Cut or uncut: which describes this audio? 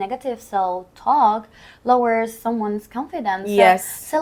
uncut